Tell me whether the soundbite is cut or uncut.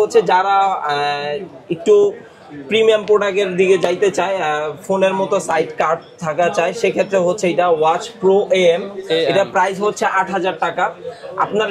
uncut